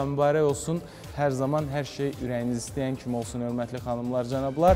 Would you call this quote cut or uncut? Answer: uncut